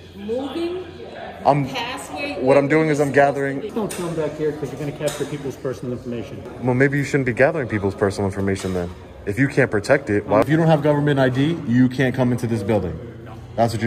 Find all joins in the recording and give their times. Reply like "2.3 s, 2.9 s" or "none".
3.7 s, 6.5 s, 10.4 s